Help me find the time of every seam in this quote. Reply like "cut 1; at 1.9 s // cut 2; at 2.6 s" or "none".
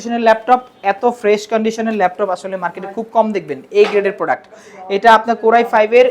none